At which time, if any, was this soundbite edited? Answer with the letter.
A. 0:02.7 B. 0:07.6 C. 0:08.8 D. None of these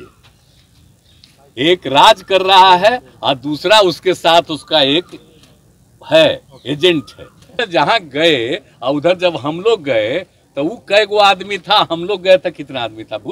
B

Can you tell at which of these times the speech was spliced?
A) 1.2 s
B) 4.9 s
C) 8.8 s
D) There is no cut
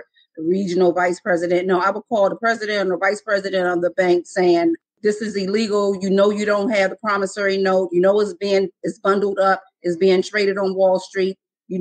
B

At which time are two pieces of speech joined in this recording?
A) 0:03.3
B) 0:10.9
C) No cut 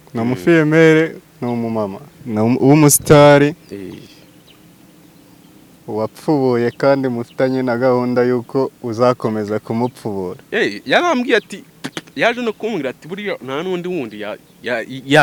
C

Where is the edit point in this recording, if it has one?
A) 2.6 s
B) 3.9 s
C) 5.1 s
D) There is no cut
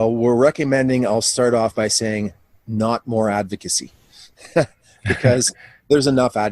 D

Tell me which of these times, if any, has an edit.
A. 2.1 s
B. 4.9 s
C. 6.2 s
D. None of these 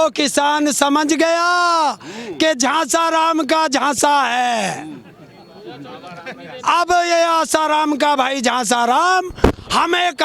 D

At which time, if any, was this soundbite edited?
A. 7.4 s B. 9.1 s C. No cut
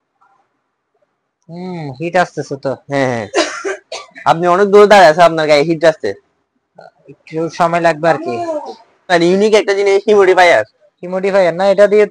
B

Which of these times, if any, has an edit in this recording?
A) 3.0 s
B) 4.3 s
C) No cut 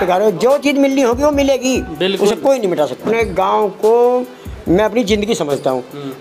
A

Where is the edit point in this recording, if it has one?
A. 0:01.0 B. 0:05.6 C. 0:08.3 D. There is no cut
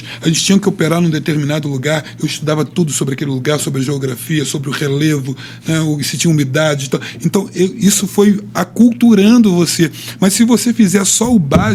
D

